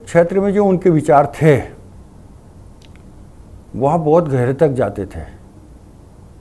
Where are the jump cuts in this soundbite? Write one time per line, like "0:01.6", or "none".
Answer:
none